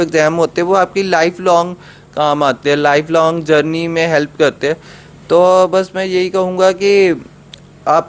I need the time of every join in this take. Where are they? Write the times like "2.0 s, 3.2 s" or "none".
none